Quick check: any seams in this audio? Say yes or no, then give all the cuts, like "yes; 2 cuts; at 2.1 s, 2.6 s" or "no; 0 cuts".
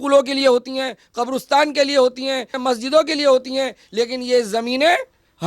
no; 0 cuts